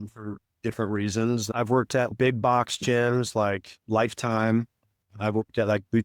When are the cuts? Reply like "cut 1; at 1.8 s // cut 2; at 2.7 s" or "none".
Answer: cut 1; at 2.0 s